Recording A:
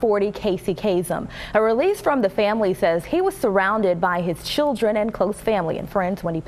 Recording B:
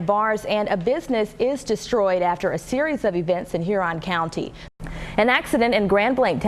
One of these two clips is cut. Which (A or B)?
B